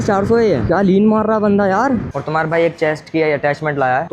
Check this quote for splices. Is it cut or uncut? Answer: cut